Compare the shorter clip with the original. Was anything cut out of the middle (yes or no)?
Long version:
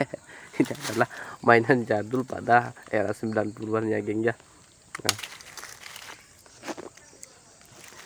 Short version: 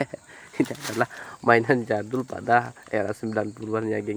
no